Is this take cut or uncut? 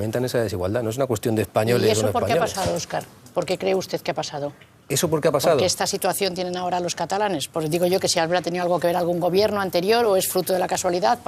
cut